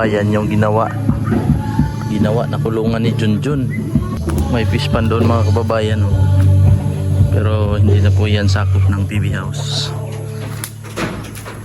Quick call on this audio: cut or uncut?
cut